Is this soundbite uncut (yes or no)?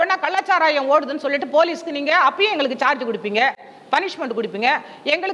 yes